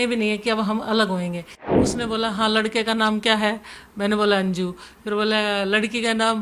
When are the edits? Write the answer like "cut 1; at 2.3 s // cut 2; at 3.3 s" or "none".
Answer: cut 1; at 1.9 s